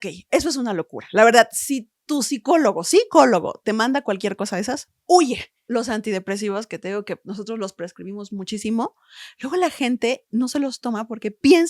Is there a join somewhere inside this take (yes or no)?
yes